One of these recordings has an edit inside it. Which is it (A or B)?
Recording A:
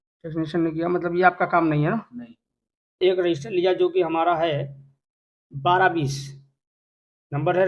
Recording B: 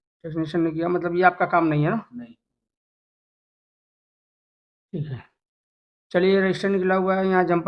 A